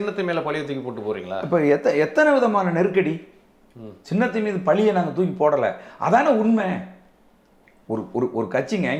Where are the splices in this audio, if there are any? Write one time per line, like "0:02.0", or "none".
none